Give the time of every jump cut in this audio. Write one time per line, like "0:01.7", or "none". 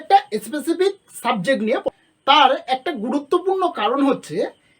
0:01.9